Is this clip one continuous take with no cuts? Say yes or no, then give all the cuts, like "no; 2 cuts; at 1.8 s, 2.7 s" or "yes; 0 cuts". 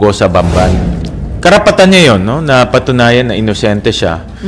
no; 1 cut; at 0.9 s